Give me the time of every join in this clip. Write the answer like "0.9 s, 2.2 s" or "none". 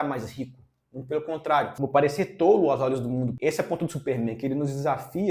1.7 s, 3.4 s

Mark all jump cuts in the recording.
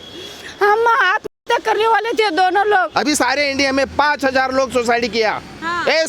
2.9 s

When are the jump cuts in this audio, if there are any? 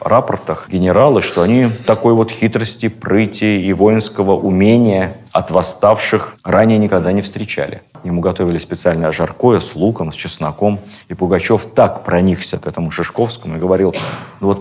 8.0 s

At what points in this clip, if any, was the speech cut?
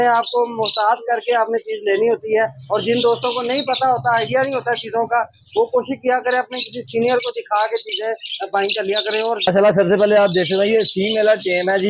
9.5 s

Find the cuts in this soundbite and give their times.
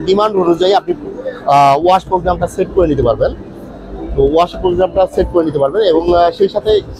none

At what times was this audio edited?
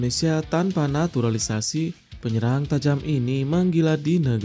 none

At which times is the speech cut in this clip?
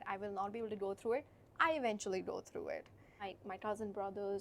3.3 s

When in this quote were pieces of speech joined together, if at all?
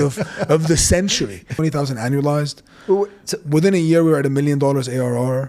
1.5 s

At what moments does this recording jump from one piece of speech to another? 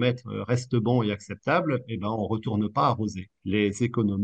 3.3 s

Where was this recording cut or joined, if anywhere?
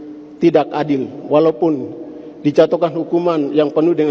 none

